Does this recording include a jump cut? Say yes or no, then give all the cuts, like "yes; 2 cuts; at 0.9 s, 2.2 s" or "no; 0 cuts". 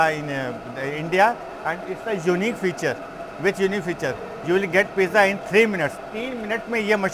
no; 0 cuts